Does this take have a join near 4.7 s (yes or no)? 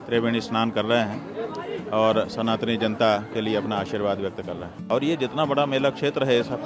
yes